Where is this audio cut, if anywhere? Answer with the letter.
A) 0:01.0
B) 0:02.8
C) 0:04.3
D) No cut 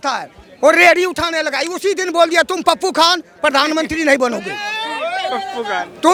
D